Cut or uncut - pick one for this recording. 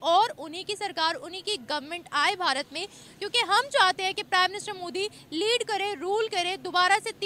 uncut